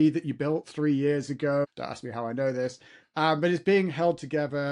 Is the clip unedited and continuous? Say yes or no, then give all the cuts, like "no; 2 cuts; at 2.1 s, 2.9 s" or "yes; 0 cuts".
no; 1 cut; at 1.8 s